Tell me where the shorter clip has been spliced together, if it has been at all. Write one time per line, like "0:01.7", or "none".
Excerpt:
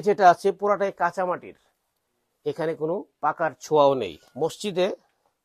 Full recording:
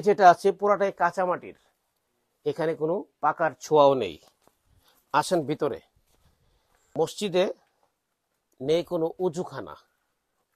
0:04.2